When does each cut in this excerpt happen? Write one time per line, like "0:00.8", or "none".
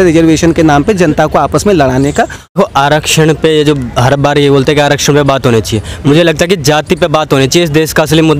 0:02.6

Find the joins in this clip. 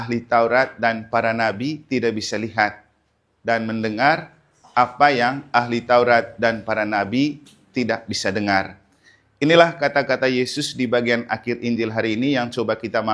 none

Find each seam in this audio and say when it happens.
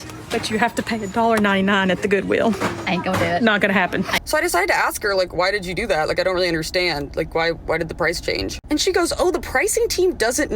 0:04.2

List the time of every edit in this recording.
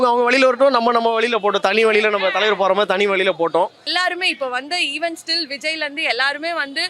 0:03.9

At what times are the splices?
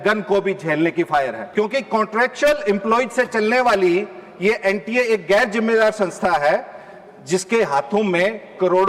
0:01.4

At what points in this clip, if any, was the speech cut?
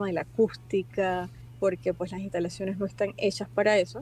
0:01.4

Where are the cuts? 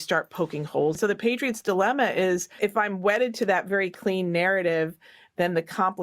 0:01.0

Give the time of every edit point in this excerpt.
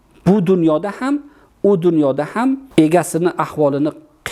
0:02.6

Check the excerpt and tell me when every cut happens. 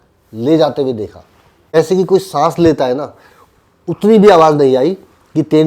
0:01.8

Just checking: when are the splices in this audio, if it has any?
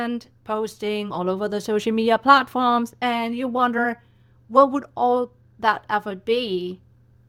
none

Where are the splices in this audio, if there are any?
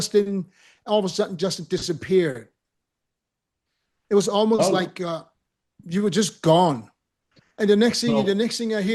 none

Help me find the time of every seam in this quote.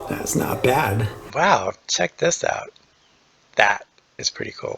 0:01.2

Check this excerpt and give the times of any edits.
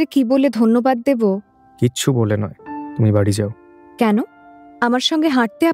none

